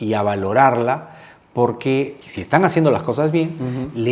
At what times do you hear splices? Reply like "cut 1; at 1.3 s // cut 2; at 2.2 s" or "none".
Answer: cut 1; at 2.2 s